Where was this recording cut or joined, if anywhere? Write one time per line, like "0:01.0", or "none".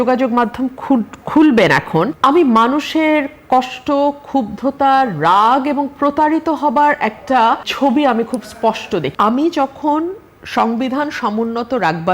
0:02.1
0:07.7
0:09.1